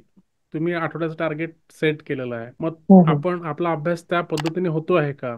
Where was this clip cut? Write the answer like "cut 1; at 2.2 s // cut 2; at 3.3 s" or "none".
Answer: cut 1; at 2.5 s